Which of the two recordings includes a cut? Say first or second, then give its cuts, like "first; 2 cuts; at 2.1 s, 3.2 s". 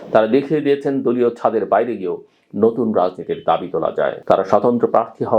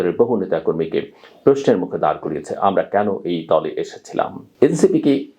second; 1 cut; at 4.4 s